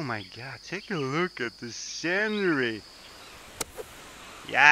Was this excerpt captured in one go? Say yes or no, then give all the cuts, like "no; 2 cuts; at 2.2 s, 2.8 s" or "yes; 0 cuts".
no; 1 cut; at 3.0 s